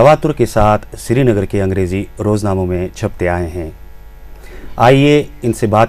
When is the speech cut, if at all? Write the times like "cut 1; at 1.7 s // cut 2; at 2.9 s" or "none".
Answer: cut 1; at 1.9 s